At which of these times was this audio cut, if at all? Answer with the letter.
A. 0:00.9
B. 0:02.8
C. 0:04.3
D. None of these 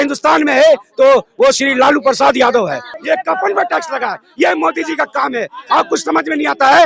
B